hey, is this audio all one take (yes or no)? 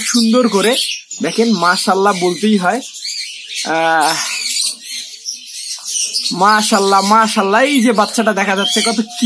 yes